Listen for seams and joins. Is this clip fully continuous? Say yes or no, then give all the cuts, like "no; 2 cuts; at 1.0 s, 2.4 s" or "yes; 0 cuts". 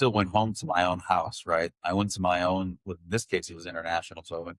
yes; 0 cuts